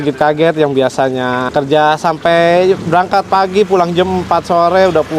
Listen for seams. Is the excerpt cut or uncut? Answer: cut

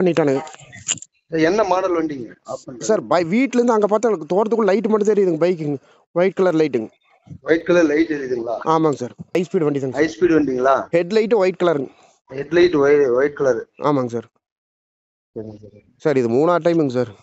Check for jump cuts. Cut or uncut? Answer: cut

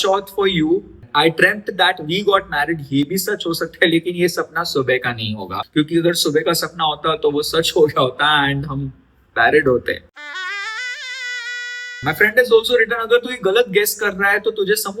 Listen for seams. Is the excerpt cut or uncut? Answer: cut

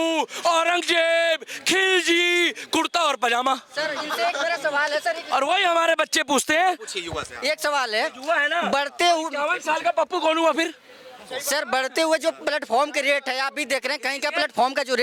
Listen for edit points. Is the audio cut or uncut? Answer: uncut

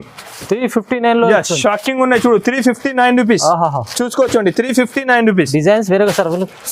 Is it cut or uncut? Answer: uncut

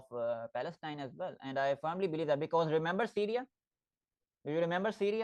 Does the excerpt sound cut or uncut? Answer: uncut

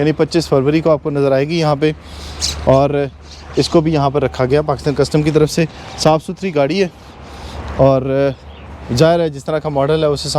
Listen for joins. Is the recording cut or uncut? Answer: uncut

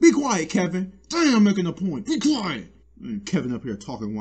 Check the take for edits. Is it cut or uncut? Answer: uncut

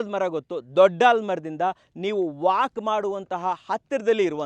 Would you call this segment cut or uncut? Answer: uncut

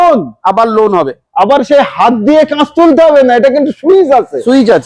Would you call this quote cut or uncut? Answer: uncut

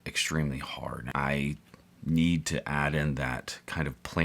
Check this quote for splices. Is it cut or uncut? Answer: cut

